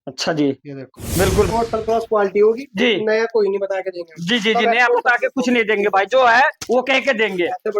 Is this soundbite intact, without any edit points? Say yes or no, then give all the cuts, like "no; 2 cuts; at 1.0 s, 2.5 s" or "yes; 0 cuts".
no; 1 cut; at 1.5 s